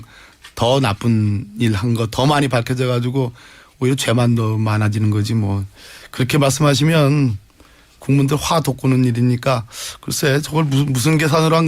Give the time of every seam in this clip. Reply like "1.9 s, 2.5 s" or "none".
3.0 s